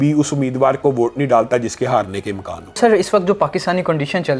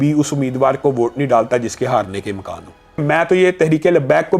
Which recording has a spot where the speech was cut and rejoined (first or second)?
first